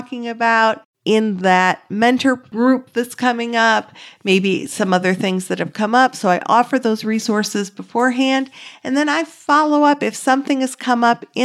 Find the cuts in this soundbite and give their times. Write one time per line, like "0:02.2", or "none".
0:00.9
0:02.5

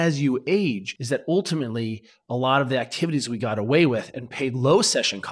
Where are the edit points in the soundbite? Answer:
0:00.9

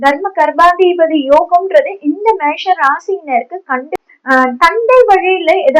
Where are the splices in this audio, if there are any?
0:04.0

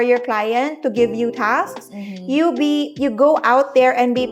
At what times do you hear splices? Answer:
none

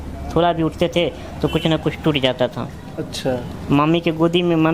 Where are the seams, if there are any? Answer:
none

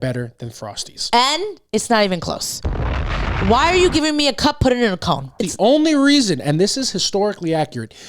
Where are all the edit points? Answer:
0:01.0
0:05.4

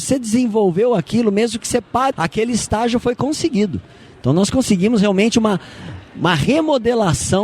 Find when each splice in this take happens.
0:02.1

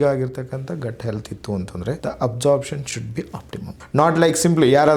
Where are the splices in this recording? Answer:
0:02.0
0:03.6

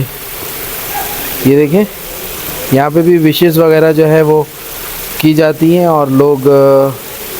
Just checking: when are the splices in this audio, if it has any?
none

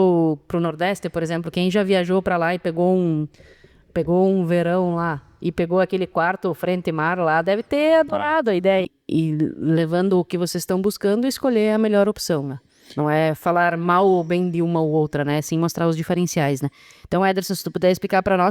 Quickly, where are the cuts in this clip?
0:08.9

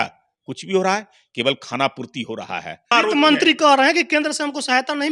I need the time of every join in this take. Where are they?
0:02.9

